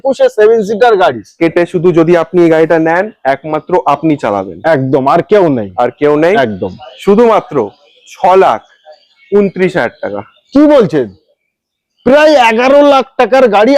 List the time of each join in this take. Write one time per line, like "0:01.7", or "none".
0:01.4